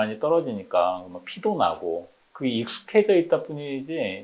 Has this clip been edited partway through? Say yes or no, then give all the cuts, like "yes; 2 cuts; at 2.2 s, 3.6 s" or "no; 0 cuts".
no; 0 cuts